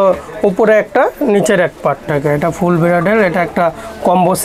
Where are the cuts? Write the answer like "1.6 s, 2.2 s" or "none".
2.1 s